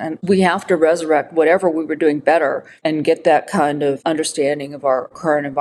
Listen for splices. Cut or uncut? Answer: cut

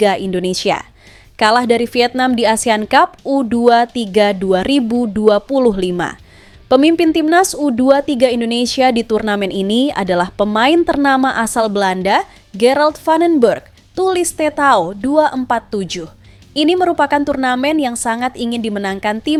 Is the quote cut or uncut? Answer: uncut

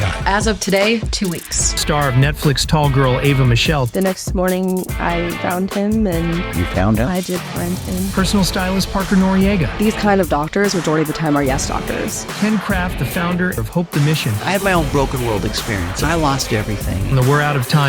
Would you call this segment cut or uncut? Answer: uncut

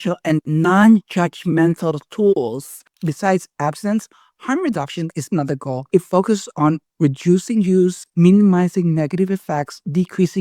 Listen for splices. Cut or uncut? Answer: cut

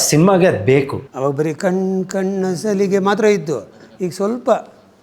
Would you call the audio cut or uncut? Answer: cut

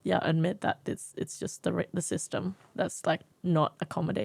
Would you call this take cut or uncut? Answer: cut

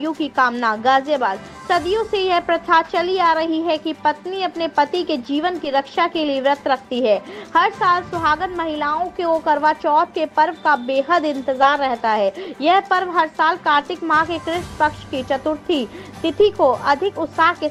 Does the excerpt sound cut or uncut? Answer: uncut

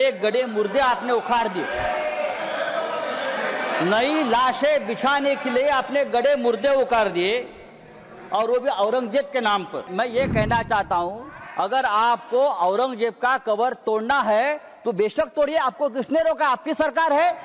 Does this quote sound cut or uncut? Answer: cut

